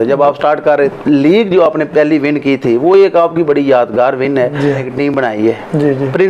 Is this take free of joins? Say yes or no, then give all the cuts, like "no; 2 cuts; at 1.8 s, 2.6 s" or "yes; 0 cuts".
no; 2 cuts; at 0.9 s, 4.8 s